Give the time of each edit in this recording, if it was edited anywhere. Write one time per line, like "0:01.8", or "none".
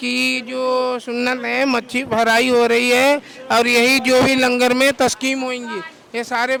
none